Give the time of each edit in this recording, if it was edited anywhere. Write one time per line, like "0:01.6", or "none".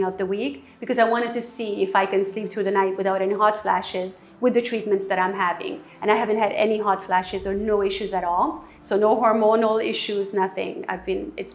none